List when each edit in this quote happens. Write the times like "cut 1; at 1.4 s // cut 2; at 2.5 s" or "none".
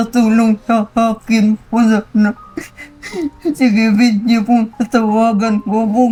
none